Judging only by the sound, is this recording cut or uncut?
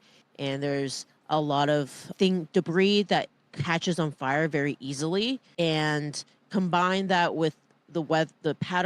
cut